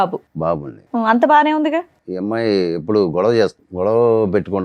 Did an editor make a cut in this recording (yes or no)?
yes